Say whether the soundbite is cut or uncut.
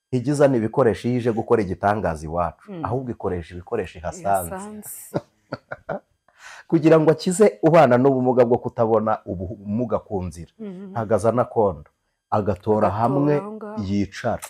uncut